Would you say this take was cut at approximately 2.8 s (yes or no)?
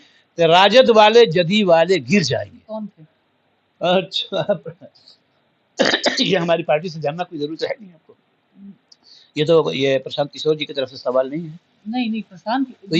yes